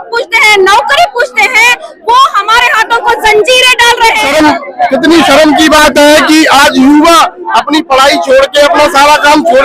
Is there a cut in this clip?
yes; 1 cut; at 4.3 s

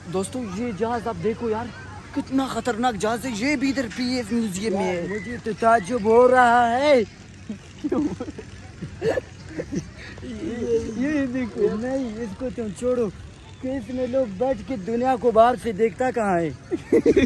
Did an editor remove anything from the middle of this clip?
no; 0 cuts

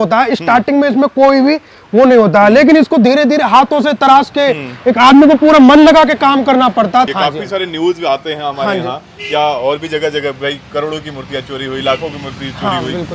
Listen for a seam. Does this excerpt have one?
yes; 1 cut; at 7.1 s

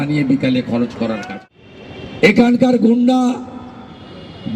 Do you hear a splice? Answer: yes; 1 cut; at 1.2 s

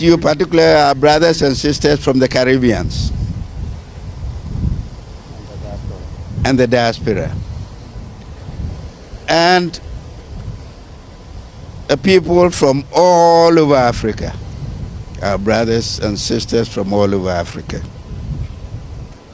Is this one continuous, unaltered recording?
yes; 0 cuts

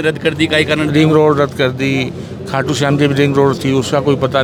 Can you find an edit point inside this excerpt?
no; 0 cuts

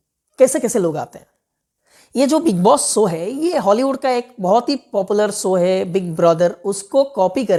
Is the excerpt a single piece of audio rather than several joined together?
yes; 0 cuts

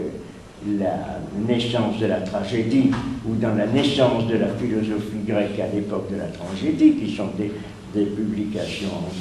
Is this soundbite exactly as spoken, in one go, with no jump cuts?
no; 1 cut; at 3.4 s

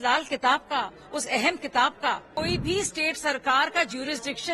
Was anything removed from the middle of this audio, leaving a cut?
yes; 1 cut; at 2.3 s

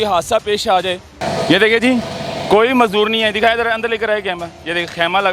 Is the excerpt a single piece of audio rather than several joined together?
no; 1 cut; at 1.1 s

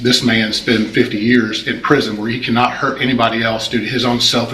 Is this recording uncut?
yes; 0 cuts

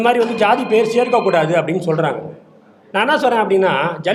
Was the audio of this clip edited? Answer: no; 0 cuts

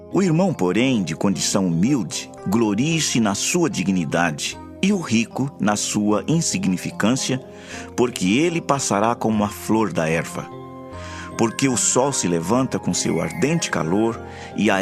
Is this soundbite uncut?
no; 1 cut; at 2.2 s

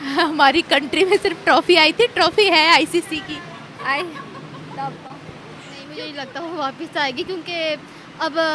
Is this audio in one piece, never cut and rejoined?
no; 1 cut; at 6.0 s

